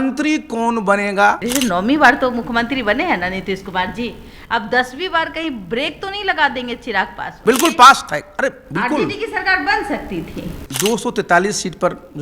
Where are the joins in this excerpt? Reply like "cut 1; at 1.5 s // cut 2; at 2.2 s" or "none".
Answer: cut 1; at 1.4 s // cut 2; at 7.2 s // cut 3; at 10.6 s